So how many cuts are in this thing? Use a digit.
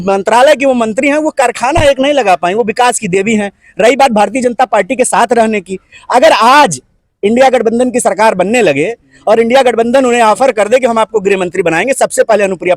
0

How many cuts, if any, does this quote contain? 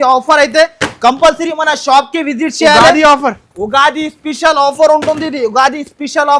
0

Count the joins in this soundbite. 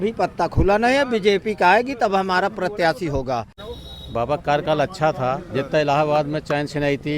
1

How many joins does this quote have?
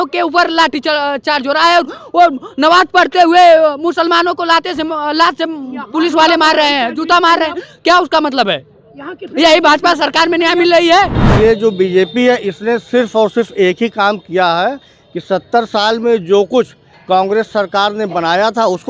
1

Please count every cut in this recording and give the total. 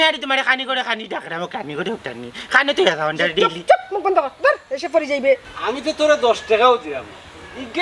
1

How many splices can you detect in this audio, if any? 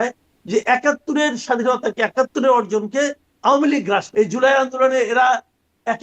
1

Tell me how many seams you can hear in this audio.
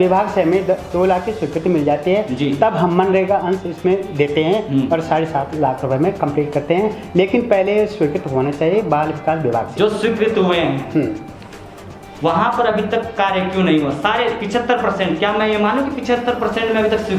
0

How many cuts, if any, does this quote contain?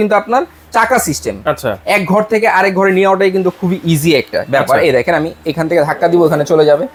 0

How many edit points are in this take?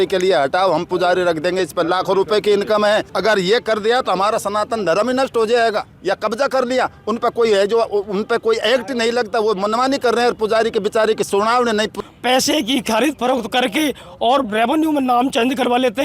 3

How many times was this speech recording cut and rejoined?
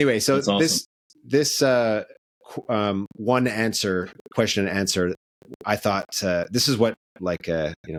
0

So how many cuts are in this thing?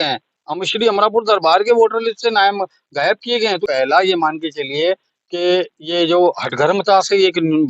1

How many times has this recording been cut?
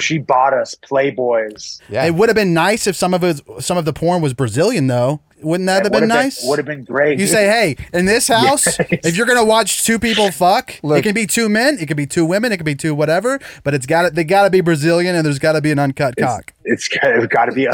4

